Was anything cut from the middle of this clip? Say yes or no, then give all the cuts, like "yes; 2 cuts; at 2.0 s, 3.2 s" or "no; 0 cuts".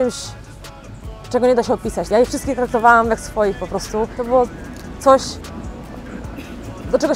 yes; 2 cuts; at 2.0 s, 4.2 s